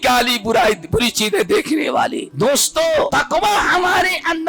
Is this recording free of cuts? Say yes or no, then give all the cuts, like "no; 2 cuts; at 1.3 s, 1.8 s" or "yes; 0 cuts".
no; 2 cuts; at 2.2 s, 3.1 s